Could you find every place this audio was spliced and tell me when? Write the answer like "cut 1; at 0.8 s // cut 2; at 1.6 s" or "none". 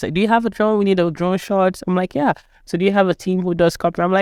none